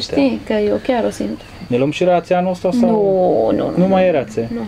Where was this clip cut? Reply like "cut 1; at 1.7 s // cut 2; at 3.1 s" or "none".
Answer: cut 1; at 1.6 s